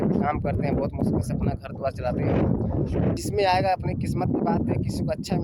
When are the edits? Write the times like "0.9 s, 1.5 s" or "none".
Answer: 3.2 s